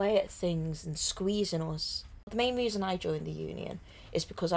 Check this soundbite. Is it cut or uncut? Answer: cut